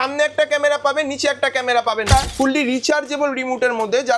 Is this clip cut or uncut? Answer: cut